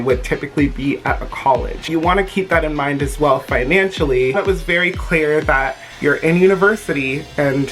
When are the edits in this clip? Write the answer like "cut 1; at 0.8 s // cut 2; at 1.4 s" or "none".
cut 1; at 1.8 s // cut 2; at 4.3 s // cut 3; at 5.9 s